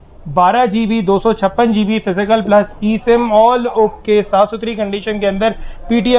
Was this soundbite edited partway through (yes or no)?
no